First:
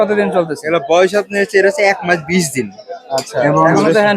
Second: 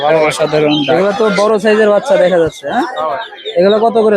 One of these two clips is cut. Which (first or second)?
second